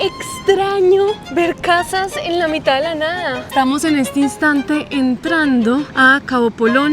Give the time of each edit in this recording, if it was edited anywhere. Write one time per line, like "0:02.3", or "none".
0:01.2
0:03.4
0:05.9